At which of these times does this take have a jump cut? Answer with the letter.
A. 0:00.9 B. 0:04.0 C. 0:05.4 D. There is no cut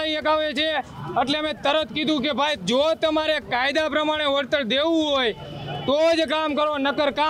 D